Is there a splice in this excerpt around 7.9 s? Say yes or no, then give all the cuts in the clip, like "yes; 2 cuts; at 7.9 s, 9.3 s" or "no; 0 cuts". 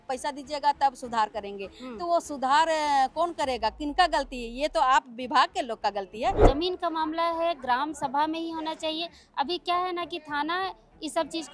no; 1 cut; at 6.4 s